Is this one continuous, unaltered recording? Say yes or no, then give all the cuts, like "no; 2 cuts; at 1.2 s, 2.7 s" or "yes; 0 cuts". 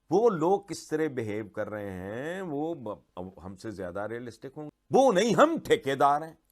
no; 1 cut; at 4.7 s